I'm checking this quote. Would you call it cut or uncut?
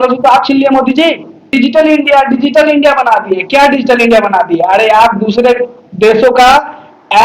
cut